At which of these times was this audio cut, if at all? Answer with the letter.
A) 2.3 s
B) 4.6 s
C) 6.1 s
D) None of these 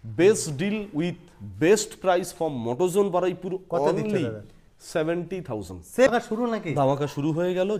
C